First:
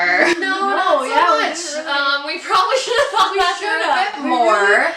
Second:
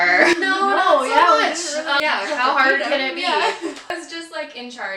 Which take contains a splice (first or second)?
second